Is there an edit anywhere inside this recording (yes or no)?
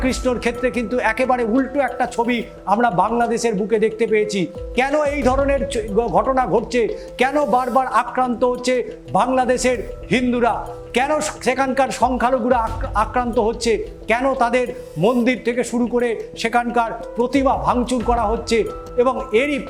no